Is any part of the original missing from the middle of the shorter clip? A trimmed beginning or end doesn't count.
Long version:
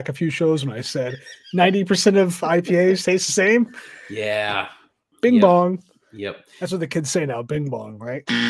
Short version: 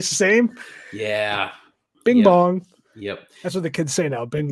no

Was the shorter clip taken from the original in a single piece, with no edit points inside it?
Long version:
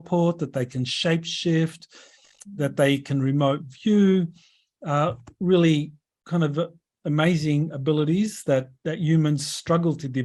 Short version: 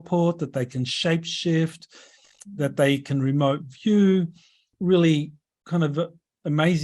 no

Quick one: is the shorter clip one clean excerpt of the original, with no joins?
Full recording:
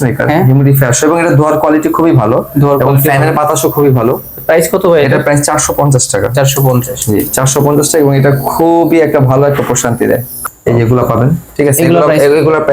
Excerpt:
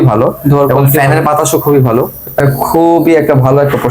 no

